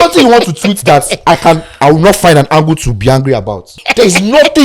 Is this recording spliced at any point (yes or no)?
yes